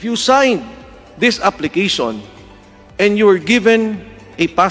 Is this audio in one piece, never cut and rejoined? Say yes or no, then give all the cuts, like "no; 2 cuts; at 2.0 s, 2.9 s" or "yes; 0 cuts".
yes; 0 cuts